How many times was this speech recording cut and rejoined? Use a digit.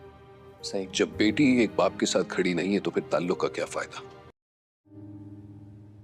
2